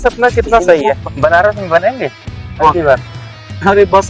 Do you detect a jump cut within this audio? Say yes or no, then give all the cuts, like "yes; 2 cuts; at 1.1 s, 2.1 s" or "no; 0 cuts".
yes; 1 cut; at 1.0 s